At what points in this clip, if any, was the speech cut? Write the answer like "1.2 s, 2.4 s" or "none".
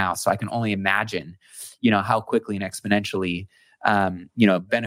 none